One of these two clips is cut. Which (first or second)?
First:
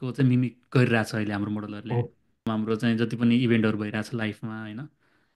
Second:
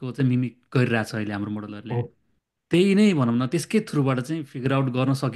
first